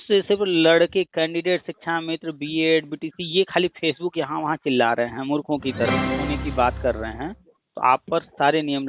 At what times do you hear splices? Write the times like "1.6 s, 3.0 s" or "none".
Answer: 5.9 s